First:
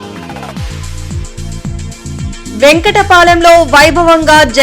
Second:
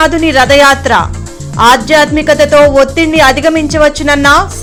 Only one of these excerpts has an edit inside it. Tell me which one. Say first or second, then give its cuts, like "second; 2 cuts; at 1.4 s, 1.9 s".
first; 1 cut; at 2.4 s